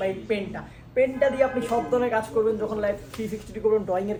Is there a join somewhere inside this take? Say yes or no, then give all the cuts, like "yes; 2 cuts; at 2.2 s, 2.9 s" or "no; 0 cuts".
no; 0 cuts